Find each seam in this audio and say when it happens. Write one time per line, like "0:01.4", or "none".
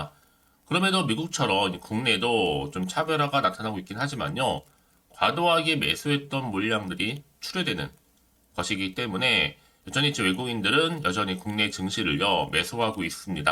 none